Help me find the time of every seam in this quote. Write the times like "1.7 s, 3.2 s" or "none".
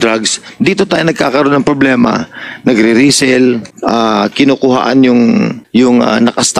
3.7 s, 5.6 s

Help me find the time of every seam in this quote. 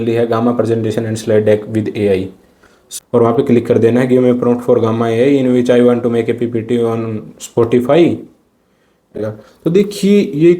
2.8 s, 9.2 s

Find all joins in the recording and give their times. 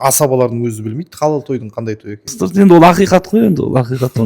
2.3 s

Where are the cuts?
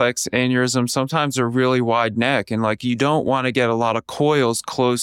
none

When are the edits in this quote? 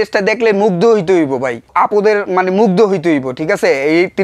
1.7 s

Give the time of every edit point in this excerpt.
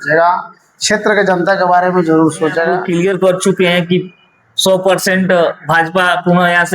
3.0 s

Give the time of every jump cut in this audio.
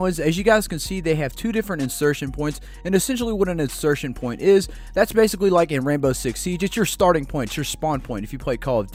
none

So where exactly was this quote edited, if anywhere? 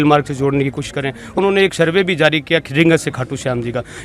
1.4 s

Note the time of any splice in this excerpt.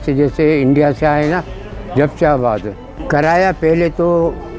none

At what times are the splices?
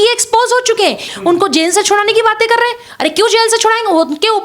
1.1 s

